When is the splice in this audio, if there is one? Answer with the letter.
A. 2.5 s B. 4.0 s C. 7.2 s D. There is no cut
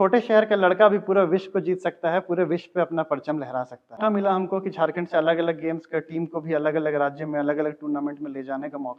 B